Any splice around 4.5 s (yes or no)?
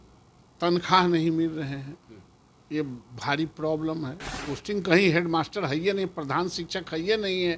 yes